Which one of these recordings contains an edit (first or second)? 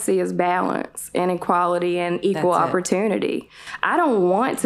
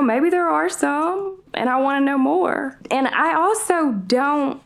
second